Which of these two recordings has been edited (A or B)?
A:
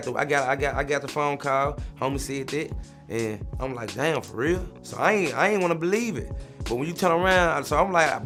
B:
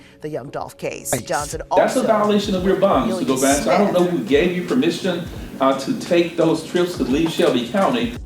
B